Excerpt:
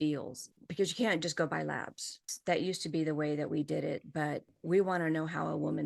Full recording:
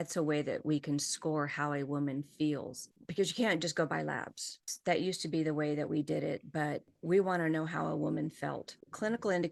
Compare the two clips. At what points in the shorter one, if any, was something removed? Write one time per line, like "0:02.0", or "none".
none